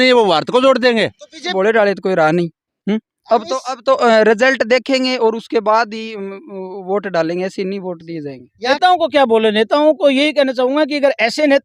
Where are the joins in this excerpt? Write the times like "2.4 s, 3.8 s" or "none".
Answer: 1.5 s, 8.7 s